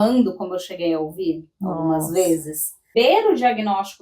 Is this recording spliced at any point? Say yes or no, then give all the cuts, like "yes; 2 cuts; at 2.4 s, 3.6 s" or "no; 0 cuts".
yes; 1 cut; at 2.9 s